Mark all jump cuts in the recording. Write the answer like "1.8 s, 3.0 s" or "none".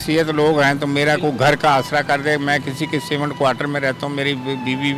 none